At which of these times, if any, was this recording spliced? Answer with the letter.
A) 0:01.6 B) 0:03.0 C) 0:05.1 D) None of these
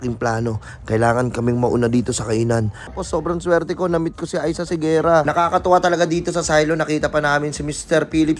B